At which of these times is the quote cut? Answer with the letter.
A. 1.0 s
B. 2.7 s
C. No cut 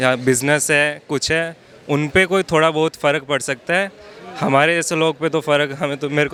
C